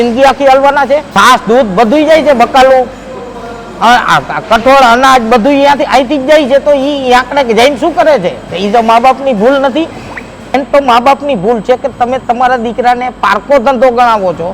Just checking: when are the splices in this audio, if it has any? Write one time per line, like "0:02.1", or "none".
0:01.1
0:10.6